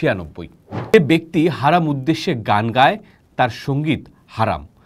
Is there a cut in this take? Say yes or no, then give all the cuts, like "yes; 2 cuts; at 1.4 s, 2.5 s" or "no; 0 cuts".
yes; 1 cut; at 0.9 s